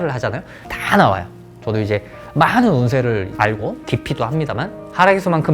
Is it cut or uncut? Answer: uncut